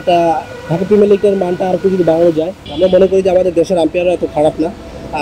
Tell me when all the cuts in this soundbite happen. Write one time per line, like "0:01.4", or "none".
0:02.6